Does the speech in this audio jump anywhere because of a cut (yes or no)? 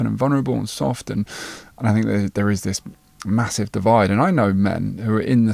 no